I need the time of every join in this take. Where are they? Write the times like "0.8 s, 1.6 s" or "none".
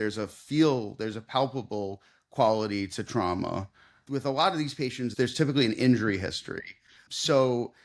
none